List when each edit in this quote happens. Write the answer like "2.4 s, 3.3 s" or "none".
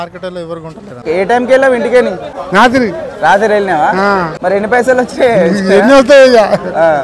1.0 s, 2.4 s, 4.3 s